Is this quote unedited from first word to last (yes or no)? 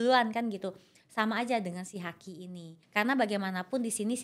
no